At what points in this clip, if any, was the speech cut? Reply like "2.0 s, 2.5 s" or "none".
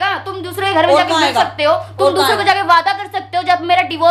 none